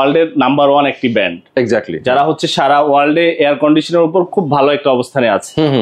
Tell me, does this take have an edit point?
no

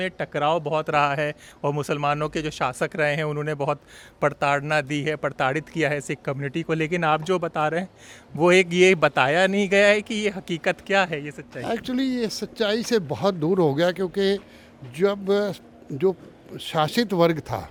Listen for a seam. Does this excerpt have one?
no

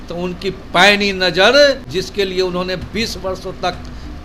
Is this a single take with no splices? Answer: no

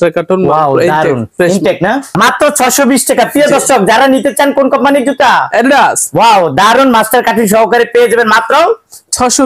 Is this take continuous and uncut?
no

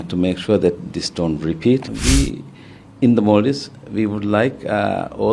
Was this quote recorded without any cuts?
no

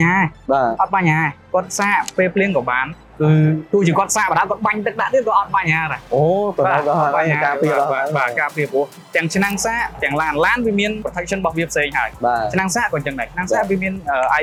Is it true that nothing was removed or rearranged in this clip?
yes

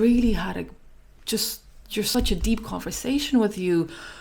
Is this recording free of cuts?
no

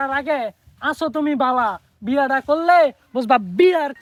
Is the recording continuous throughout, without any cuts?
yes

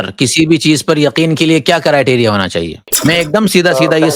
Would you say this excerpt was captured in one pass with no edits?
no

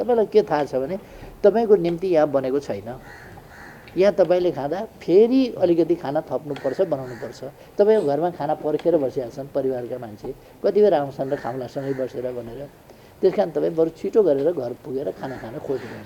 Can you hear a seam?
no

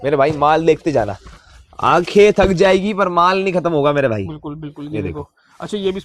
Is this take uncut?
yes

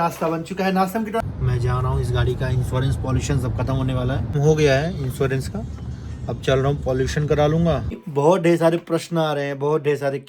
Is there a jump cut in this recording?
yes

